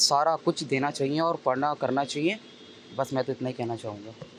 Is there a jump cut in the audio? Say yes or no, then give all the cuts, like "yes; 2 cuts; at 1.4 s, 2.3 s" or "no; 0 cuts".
no; 0 cuts